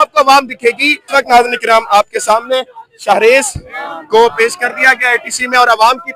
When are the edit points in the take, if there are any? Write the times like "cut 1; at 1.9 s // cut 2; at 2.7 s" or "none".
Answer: cut 1; at 1.1 s

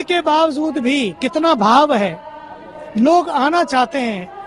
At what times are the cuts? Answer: none

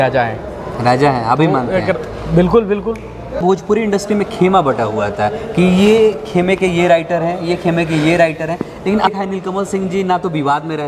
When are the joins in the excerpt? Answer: cut 1; at 3.4 s // cut 2; at 9.1 s

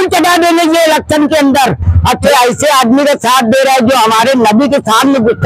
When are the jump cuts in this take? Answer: cut 1; at 2.3 s

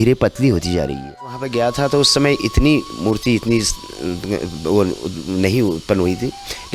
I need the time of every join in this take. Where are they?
cut 1; at 1.4 s

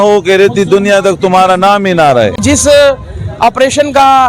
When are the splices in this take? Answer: cut 1; at 2.4 s

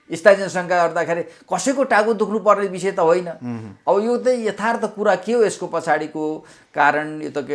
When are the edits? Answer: none

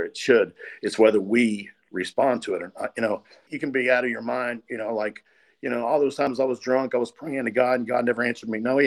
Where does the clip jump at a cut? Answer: cut 1; at 3.5 s

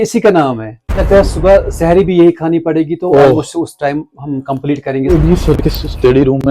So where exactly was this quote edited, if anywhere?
cut 1; at 1.0 s // cut 2; at 5.1 s

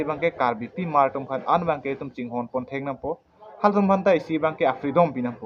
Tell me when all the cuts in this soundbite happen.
none

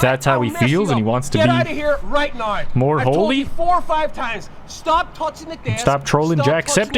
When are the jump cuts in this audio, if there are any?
none

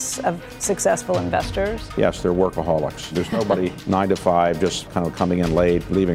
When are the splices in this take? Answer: cut 1; at 1.8 s // cut 2; at 3.3 s // cut 3; at 4.9 s

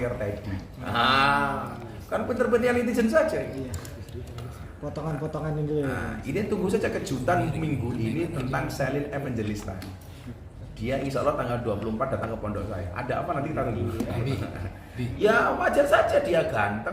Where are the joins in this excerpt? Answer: cut 1; at 15.0 s

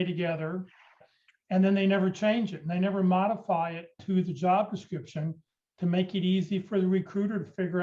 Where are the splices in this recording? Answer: cut 1; at 1.1 s

